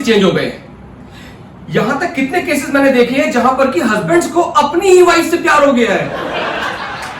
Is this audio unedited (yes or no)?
no